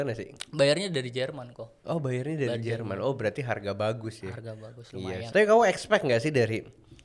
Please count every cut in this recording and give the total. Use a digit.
1